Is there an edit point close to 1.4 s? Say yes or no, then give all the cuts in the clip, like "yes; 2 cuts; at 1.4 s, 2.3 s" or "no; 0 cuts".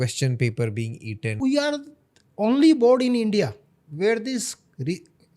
yes; 1 cut; at 1.4 s